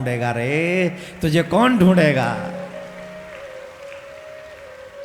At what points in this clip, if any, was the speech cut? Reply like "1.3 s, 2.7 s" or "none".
none